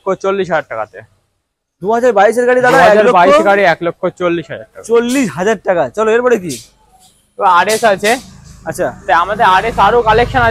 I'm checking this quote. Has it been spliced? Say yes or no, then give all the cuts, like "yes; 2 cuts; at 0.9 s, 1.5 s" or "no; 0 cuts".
no; 0 cuts